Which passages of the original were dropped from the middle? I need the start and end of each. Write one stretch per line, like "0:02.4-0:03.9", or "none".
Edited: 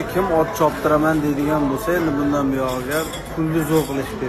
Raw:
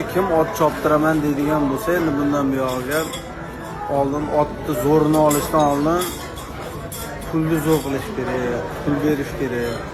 0:03.2-0:07.2